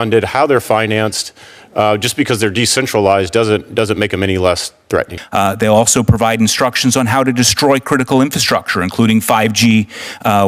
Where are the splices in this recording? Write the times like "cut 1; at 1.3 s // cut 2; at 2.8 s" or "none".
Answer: cut 1; at 5.2 s